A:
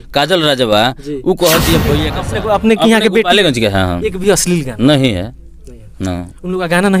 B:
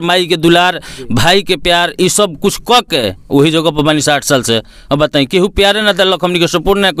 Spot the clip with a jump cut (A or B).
A